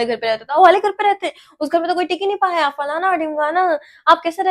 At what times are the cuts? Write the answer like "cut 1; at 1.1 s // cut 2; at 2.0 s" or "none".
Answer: none